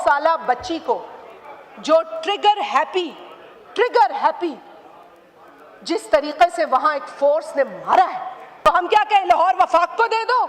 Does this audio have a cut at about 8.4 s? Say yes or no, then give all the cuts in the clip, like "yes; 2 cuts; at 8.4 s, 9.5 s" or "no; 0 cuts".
yes; 1 cut; at 8.4 s